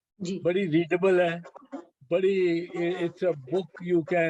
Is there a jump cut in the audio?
no; 0 cuts

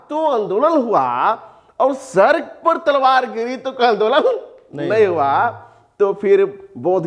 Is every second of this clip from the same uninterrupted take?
yes; 0 cuts

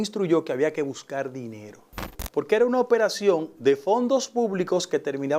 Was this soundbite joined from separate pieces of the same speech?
yes; 1 cut; at 2.2 s

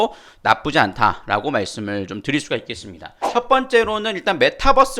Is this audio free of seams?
no; 1 cut; at 3.2 s

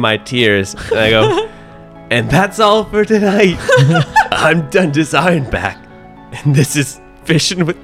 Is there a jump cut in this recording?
no; 0 cuts

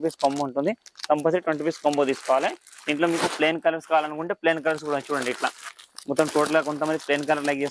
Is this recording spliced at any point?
no; 0 cuts

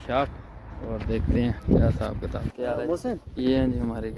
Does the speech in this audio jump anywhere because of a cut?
yes; 2 cuts; at 2.5 s, 3.3 s

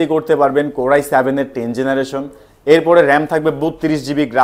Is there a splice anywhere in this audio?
no; 0 cuts

